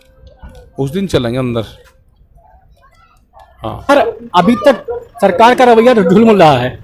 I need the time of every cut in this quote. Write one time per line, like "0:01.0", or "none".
0:03.9